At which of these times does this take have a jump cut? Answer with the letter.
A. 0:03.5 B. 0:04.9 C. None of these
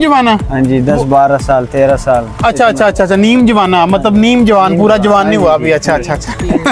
C